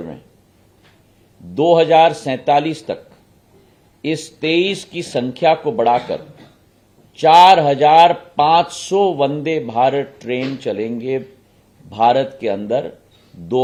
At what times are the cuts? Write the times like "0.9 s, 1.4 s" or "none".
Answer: none